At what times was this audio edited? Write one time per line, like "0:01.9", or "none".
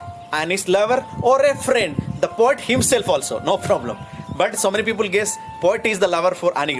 none